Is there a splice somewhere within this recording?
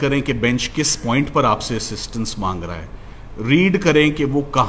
no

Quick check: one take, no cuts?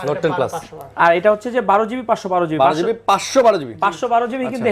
yes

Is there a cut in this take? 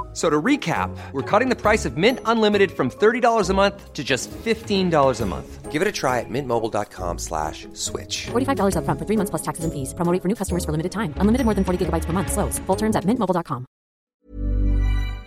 yes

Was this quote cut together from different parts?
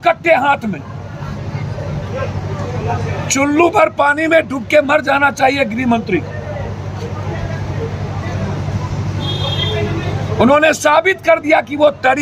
no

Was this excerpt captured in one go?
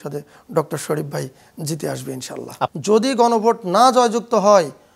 no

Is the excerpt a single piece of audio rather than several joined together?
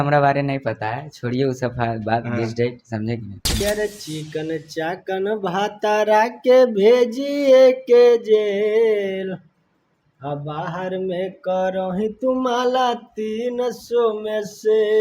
no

